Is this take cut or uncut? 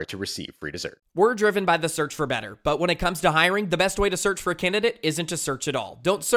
cut